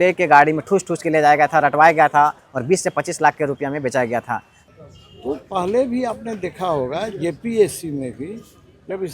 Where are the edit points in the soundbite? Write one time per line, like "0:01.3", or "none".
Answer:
0:04.5